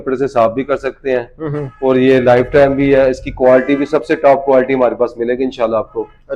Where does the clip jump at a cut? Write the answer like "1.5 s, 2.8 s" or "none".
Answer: none